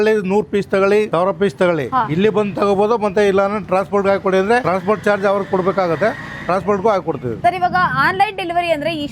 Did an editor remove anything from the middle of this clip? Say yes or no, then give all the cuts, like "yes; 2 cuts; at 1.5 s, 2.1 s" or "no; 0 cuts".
no; 0 cuts